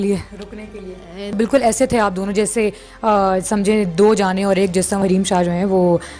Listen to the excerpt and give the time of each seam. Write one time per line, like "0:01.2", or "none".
0:01.4
0:05.0